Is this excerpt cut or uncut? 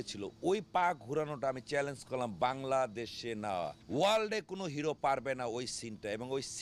cut